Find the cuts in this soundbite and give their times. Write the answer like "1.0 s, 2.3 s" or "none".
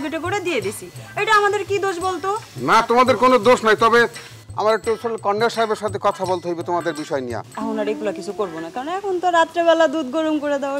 7.5 s